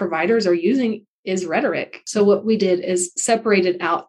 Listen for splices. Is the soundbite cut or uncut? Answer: cut